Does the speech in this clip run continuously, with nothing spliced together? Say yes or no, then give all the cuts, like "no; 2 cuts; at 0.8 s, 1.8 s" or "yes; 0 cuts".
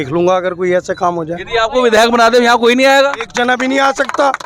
yes; 0 cuts